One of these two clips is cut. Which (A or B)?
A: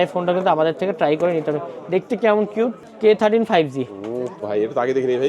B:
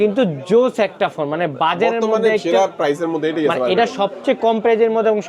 A